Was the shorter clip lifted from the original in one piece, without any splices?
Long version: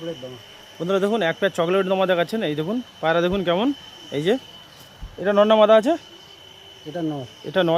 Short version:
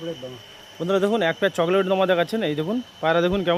yes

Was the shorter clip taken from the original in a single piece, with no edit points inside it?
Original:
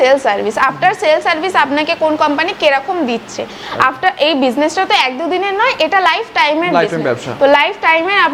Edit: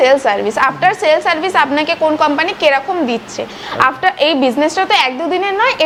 yes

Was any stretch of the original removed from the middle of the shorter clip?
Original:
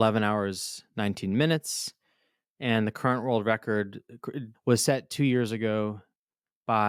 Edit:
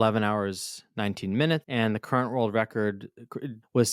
yes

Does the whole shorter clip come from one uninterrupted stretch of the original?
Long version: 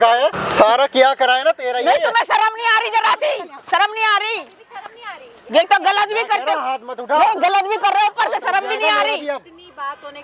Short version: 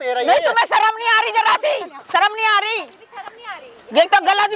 yes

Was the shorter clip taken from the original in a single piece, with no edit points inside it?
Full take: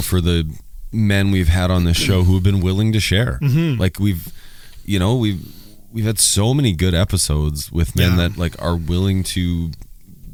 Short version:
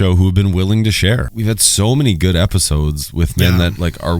no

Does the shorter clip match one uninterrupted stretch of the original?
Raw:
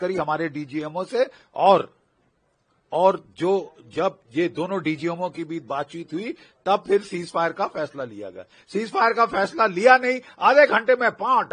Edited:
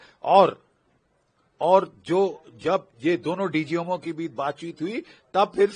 yes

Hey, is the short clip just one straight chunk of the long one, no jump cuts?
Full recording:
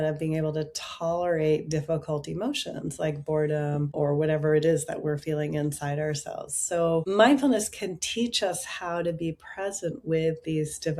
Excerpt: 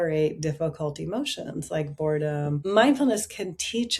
no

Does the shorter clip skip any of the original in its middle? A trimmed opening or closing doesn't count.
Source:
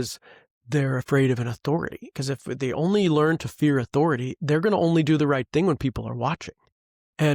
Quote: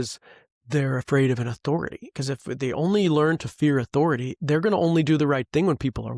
no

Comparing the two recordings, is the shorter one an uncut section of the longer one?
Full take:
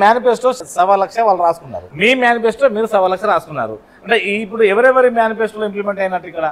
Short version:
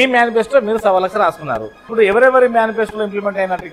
no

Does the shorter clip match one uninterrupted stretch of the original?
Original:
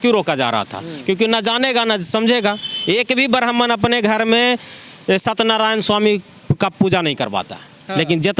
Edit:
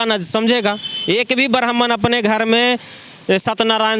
yes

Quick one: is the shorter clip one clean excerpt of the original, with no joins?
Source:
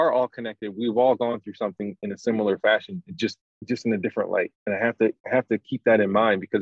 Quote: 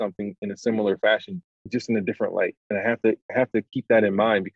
no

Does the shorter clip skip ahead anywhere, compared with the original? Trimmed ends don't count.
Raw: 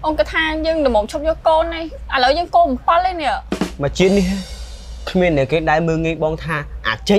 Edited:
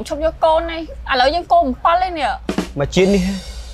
no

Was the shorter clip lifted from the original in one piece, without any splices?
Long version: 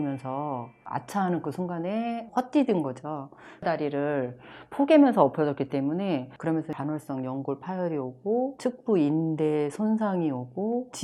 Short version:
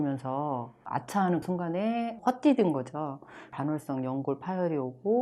no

